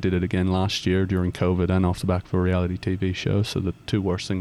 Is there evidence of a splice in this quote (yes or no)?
no